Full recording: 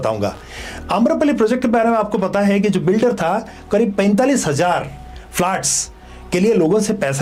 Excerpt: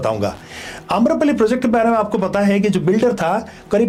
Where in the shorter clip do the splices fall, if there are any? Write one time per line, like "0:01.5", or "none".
none